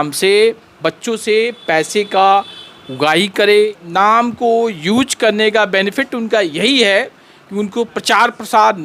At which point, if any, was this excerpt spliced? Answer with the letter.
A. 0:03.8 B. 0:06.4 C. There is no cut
A